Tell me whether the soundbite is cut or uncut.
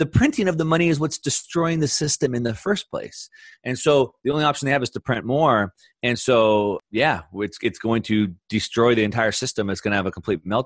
cut